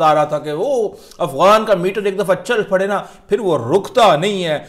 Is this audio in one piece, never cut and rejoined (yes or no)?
yes